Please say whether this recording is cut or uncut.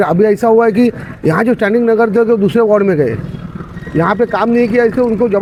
uncut